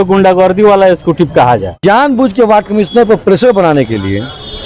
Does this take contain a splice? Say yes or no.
yes